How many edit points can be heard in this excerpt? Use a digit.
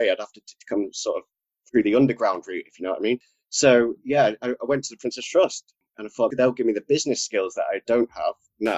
0